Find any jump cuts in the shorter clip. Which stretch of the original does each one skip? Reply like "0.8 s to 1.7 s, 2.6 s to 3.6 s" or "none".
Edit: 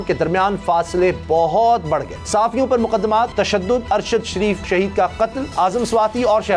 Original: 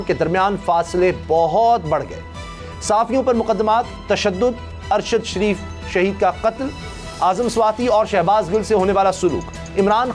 2.2 s to 2.7 s, 4.2 s to 4.6 s, 5.6 s to 5.9 s, 6.7 s to 7.1 s